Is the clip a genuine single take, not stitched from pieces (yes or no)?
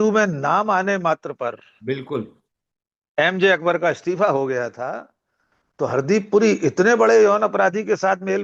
yes